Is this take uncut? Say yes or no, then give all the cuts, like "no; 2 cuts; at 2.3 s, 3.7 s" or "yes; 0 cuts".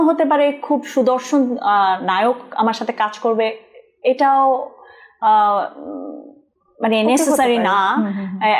yes; 0 cuts